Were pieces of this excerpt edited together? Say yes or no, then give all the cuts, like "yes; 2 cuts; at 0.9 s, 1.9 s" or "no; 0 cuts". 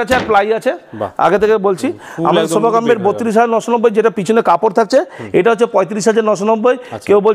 no; 0 cuts